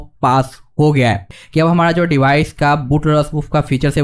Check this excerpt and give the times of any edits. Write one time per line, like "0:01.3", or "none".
0:01.3